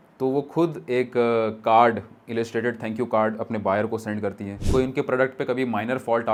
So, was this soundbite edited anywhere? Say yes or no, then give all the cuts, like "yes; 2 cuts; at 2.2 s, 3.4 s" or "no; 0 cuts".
no; 0 cuts